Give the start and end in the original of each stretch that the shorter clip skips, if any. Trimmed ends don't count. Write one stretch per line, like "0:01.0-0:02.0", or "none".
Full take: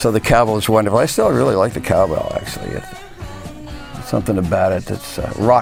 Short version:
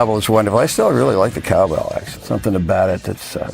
0:02.5-0:03.9

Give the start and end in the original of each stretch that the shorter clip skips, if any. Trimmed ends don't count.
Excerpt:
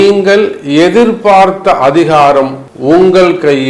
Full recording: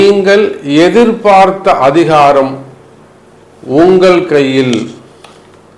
0:02.7-0:03.5

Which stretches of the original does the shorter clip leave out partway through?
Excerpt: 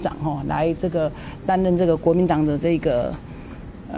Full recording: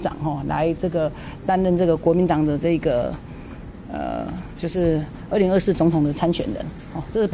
none

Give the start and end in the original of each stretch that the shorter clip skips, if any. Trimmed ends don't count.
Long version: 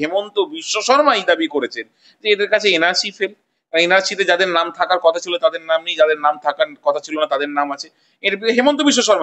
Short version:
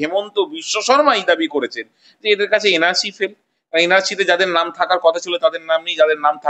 none

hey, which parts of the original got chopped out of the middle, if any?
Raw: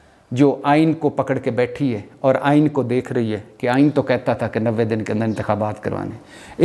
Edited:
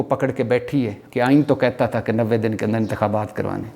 0:02.1-0:03.5

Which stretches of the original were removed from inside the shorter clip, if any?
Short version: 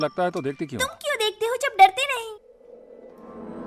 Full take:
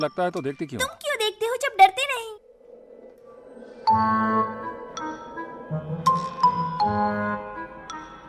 none

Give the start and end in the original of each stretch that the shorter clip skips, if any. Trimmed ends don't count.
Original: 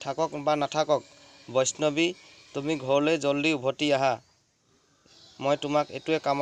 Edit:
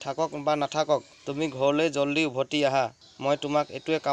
0:01.2-0:02.5
0:04.3-0:05.2

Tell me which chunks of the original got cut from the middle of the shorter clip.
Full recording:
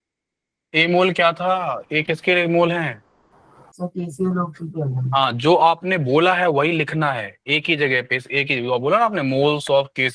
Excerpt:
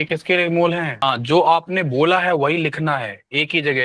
0:03.0-0:05.1

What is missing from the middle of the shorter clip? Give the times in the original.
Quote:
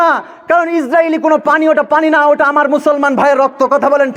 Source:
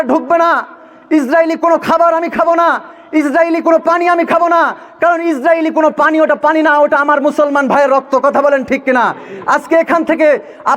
none

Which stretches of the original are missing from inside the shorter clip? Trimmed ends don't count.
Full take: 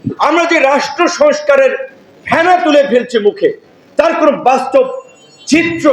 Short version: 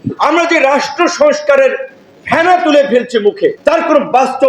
0:03.6-0:03.9

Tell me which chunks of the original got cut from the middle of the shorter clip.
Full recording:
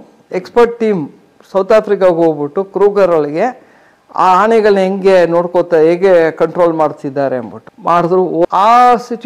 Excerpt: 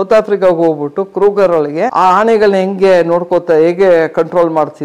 0:03.5-0:04.1

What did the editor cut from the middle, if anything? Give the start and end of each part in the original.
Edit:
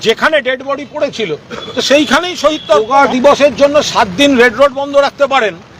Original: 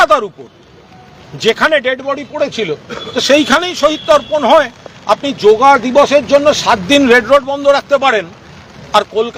0:04.3-0:05.6

